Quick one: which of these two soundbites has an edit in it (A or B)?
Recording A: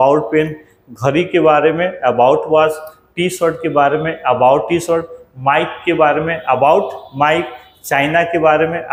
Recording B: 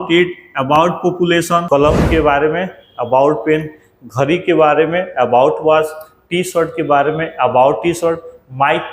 B